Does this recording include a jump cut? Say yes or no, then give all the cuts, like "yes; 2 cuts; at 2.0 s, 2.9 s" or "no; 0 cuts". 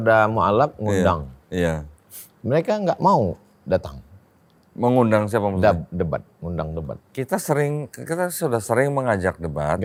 no; 0 cuts